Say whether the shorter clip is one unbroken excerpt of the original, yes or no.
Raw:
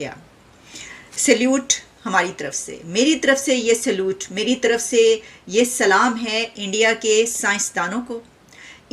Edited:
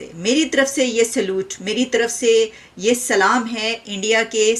yes